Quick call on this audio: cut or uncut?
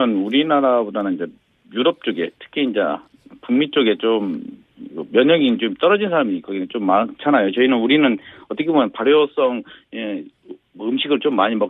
cut